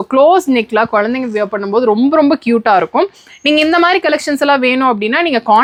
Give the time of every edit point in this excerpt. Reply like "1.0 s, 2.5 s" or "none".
none